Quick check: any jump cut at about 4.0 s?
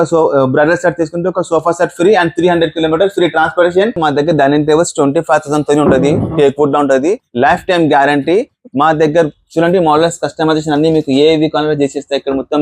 yes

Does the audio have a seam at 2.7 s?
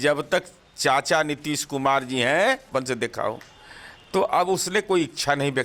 yes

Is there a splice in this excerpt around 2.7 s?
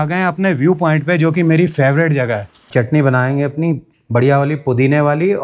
yes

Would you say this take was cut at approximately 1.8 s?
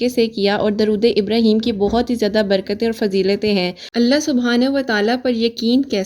no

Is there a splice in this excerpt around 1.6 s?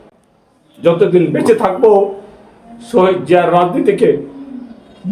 yes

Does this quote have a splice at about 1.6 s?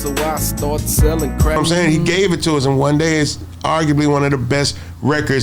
yes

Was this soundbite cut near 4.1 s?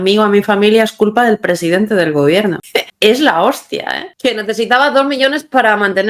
yes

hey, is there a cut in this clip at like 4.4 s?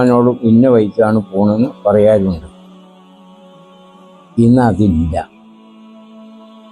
yes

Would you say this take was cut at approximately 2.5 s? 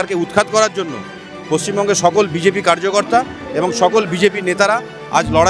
no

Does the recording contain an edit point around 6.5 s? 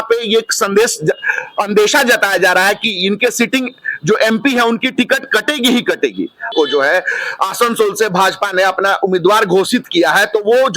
yes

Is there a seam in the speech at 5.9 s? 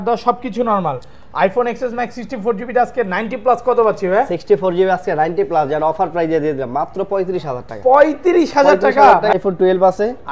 no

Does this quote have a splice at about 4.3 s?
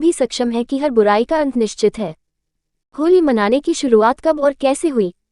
no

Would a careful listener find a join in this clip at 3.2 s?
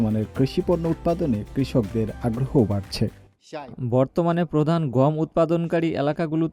no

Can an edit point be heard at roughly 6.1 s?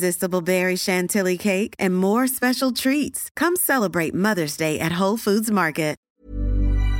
yes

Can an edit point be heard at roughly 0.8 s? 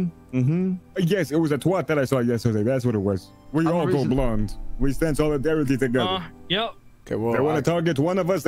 yes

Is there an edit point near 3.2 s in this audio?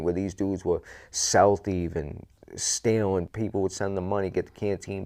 yes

